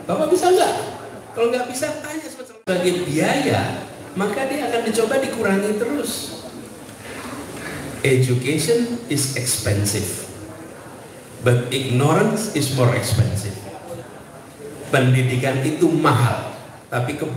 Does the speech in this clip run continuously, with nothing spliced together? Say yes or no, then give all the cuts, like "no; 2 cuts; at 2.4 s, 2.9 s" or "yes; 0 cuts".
no; 1 cut; at 2.6 s